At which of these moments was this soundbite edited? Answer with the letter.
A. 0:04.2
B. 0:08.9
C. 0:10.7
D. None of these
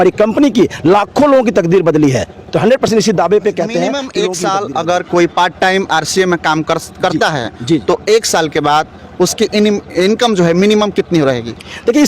A